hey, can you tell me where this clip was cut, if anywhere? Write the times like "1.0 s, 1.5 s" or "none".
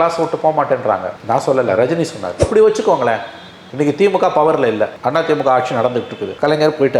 2.4 s